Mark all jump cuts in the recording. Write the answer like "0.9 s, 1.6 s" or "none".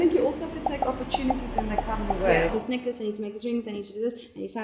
2.6 s